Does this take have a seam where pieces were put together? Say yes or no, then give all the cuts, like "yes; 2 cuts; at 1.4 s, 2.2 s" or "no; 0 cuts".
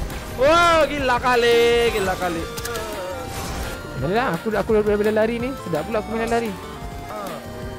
yes; 1 cut; at 6.8 s